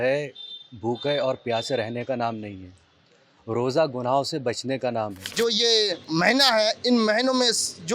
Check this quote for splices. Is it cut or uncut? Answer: cut